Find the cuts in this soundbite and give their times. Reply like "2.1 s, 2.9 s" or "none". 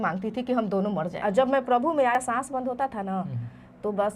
1.1 s, 2.2 s